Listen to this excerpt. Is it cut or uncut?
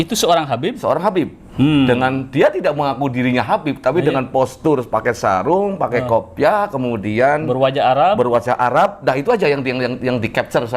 uncut